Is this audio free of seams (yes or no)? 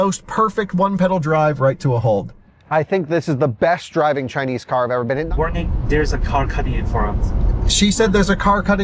no